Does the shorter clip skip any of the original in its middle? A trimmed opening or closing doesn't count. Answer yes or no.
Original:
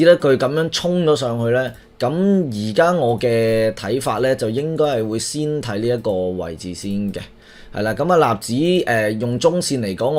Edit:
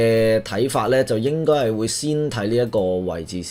no